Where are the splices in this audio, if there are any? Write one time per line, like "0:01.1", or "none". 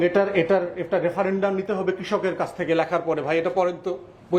none